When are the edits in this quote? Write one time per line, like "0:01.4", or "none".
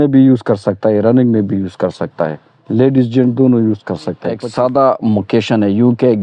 0:04.4